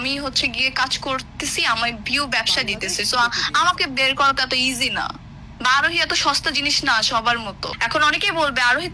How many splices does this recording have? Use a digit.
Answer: 1